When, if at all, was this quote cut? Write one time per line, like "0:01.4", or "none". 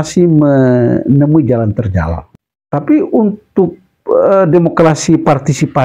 0:02.2